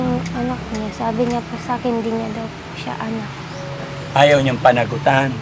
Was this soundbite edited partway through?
no; 0 cuts

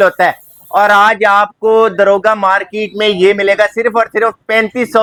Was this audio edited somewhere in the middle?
no; 0 cuts

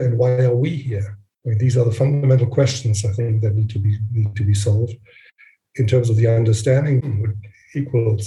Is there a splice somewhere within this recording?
no; 0 cuts

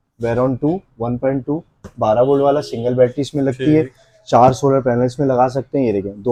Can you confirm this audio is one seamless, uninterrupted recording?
yes; 0 cuts

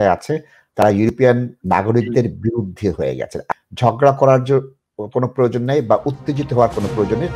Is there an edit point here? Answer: yes; 1 cut; at 3.5 s

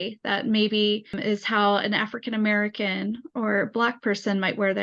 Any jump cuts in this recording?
no; 0 cuts

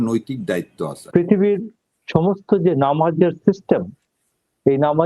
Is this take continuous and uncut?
no; 1 cut; at 1.0 s

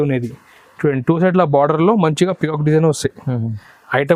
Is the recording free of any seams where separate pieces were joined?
yes; 0 cuts

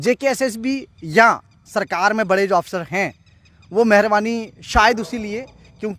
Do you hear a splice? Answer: no; 0 cuts

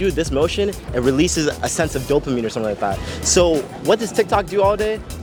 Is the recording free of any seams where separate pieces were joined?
yes; 0 cuts

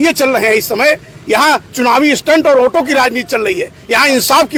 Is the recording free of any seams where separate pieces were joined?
yes; 0 cuts

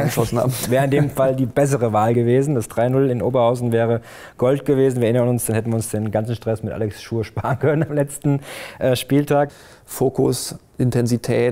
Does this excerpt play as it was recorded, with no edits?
no; 1 cut; at 9.5 s

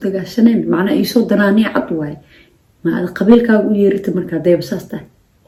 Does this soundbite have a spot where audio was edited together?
no; 0 cuts

